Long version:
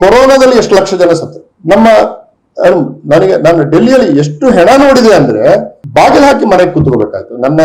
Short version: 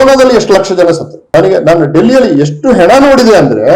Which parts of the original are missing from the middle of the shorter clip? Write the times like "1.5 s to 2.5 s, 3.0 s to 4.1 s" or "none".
1.4 s to 3.0 s